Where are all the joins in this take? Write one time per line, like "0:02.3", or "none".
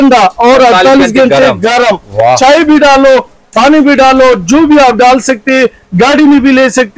none